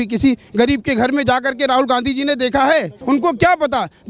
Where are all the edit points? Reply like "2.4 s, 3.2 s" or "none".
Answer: 2.9 s